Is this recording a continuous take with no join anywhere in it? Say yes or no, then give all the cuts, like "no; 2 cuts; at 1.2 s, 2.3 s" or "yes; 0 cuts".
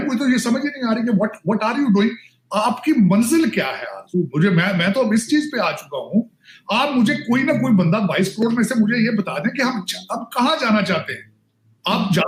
yes; 0 cuts